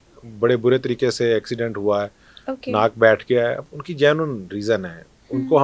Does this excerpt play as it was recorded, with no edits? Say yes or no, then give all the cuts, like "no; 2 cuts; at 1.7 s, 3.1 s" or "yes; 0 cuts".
yes; 0 cuts